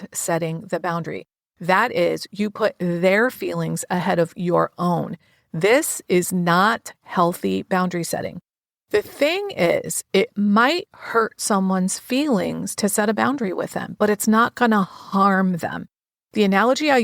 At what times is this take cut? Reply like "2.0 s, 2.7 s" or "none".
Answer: none